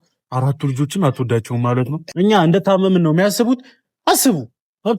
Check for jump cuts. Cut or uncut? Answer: cut